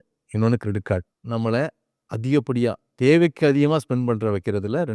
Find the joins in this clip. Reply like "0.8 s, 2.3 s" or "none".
1.2 s